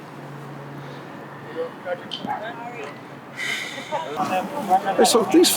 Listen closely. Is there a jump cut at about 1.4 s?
no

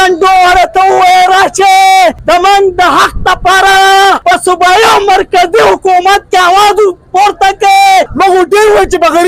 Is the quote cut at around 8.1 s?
yes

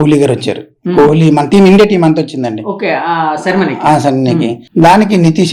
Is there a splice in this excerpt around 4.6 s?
yes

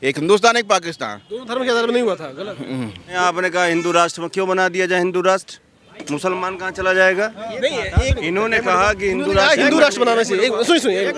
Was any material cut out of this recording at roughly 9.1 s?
no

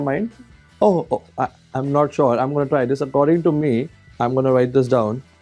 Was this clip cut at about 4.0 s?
yes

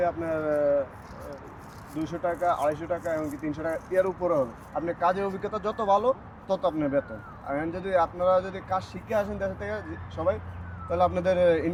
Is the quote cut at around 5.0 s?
no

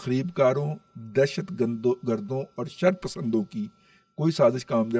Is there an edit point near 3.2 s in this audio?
no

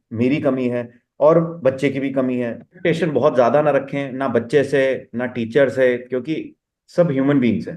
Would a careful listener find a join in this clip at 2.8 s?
yes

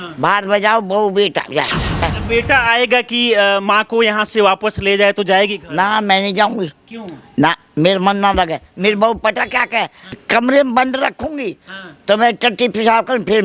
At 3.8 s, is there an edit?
no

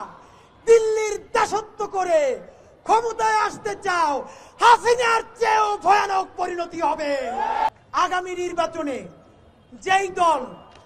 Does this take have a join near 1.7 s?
no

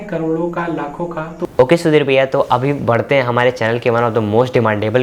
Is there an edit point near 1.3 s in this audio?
yes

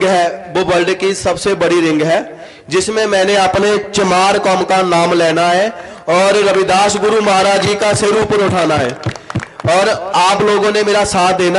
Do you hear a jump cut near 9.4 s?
no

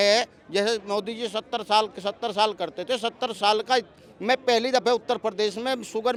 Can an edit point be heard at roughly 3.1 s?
no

